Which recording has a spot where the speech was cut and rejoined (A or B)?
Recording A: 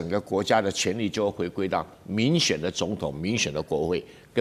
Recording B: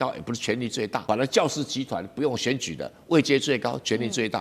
B